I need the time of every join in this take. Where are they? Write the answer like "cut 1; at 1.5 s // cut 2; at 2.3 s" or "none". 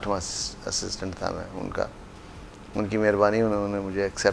none